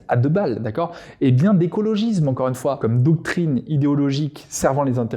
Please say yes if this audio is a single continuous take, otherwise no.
no